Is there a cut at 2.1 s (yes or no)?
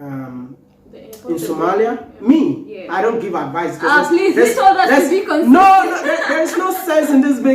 yes